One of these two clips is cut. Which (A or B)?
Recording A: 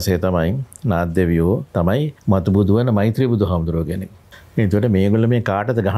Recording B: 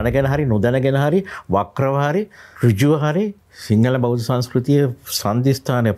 A